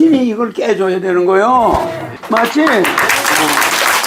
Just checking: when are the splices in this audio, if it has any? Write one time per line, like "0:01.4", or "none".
0:02.1